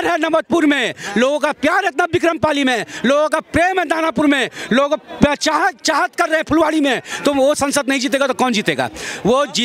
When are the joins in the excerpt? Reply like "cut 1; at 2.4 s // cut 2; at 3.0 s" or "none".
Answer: none

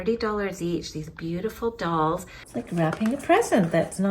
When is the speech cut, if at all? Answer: cut 1; at 2.4 s

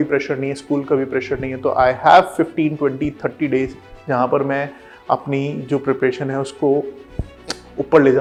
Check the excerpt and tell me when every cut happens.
none

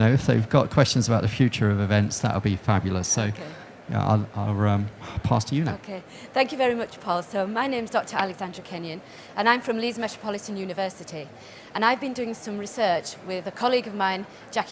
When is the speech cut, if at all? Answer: cut 1; at 3.9 s

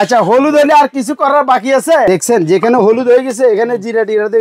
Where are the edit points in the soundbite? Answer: cut 1; at 2.1 s

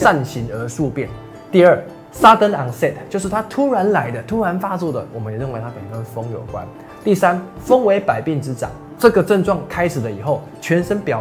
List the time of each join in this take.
none

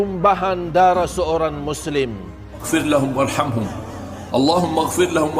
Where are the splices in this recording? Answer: cut 1; at 2.6 s

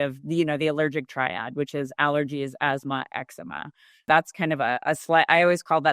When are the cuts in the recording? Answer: cut 1; at 4.1 s

